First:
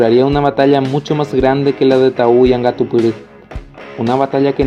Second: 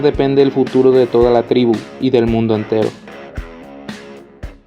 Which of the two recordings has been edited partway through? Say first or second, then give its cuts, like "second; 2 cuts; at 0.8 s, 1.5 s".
second; 1 cut; at 2.9 s